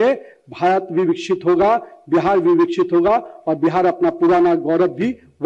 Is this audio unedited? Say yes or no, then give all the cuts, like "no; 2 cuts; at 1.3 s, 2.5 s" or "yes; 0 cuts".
yes; 0 cuts